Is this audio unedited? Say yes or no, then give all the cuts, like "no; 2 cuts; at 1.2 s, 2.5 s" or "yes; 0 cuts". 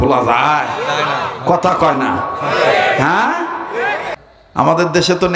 no; 1 cut; at 4.1 s